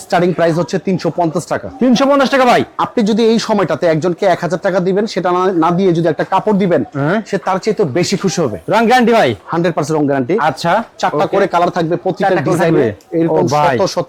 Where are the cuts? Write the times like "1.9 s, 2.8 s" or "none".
none